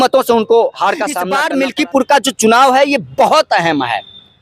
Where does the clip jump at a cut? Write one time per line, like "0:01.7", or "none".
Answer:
0:01.3